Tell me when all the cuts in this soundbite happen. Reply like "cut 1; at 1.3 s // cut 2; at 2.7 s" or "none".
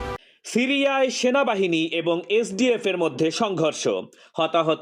none